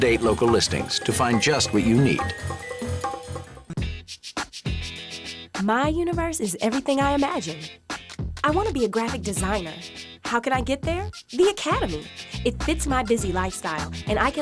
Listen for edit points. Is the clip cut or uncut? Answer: cut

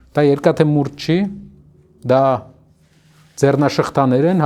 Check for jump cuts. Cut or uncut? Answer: uncut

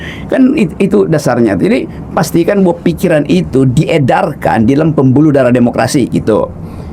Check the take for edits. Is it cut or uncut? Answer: uncut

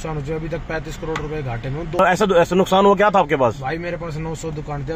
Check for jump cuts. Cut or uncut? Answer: cut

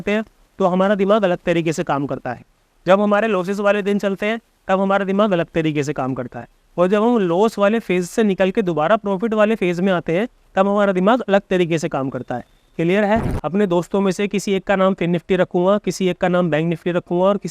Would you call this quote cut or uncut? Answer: cut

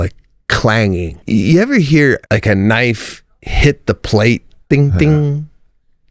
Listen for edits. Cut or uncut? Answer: cut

